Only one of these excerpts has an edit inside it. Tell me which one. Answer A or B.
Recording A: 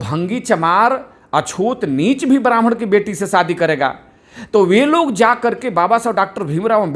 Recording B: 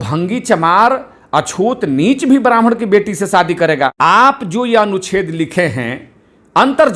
B